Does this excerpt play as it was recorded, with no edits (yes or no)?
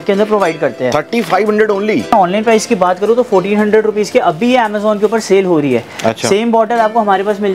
no